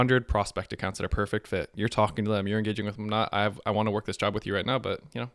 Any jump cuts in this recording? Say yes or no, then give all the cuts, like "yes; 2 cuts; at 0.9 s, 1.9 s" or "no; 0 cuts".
no; 0 cuts